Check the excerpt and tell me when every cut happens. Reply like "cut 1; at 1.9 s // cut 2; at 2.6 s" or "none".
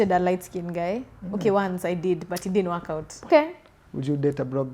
cut 1; at 3.3 s